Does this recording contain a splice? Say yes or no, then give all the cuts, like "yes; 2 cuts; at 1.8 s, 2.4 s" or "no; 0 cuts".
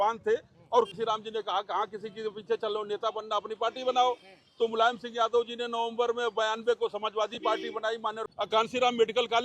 yes; 2 cuts; at 0.9 s, 8.2 s